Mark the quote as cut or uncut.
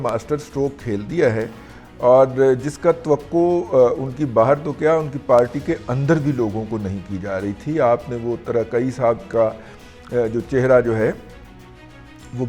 uncut